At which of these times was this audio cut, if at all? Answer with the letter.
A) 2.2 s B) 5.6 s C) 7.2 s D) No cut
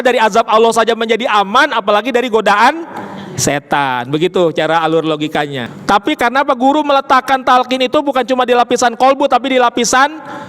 B